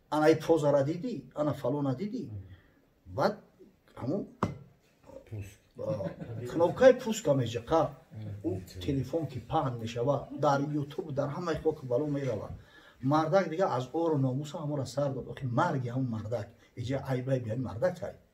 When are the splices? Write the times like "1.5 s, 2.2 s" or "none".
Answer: none